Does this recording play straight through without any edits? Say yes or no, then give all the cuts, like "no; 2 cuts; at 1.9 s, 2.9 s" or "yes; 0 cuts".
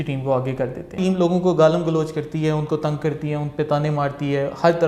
no; 1 cut; at 1.0 s